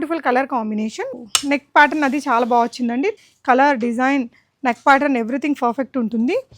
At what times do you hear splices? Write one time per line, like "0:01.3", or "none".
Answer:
0:01.1
0:03.1

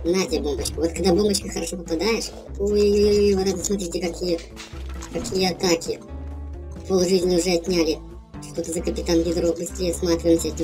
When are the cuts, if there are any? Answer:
0:02.4

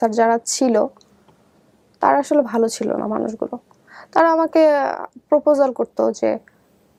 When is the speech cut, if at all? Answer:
none

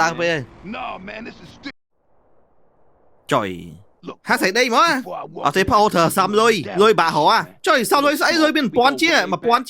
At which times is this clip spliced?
0:01.7

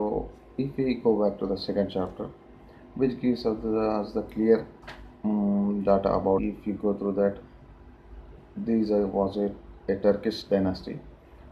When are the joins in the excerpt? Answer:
none

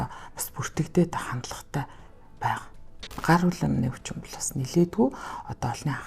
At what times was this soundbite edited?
0:03.1

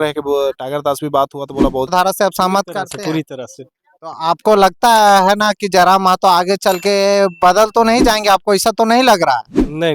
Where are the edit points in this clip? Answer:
0:01.9

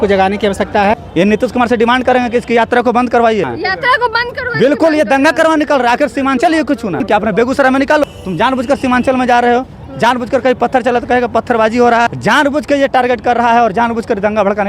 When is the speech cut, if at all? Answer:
0:01.0
0:03.5
0:07.0
0:08.2
0:12.1

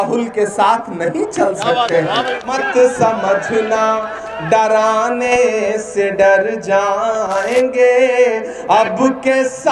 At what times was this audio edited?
0:02.4

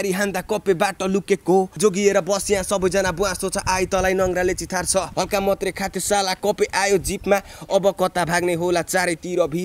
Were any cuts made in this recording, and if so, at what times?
0:01.7
0:05.1

